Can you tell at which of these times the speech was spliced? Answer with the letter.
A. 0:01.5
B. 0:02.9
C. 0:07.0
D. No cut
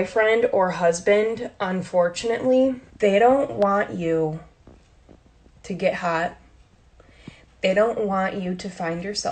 B